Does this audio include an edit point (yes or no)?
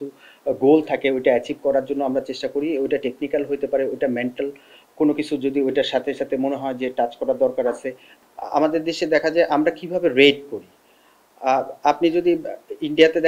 yes